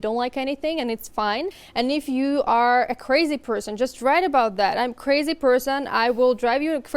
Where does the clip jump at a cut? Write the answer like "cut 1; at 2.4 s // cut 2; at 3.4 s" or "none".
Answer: cut 1; at 1.6 s